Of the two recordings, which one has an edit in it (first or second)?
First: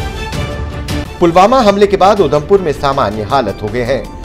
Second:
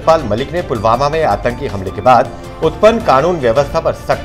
first